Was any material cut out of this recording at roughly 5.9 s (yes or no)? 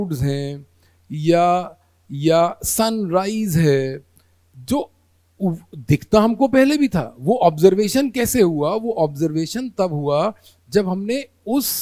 no